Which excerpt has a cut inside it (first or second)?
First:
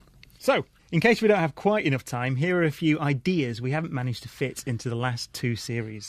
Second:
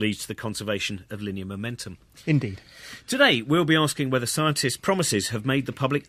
first